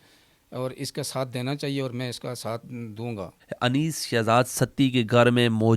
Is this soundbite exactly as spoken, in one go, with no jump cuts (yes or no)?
no